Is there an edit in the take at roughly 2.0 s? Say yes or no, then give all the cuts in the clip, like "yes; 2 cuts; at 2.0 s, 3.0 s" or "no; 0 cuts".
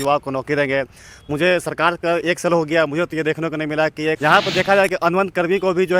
no; 1 cut; at 4.2 s